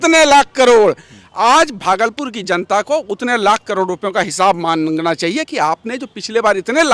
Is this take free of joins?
yes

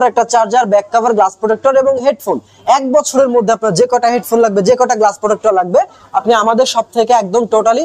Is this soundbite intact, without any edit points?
yes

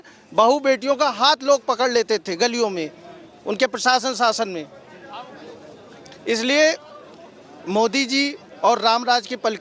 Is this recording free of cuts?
yes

